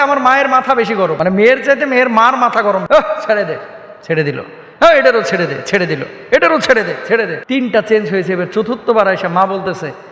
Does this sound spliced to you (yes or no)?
yes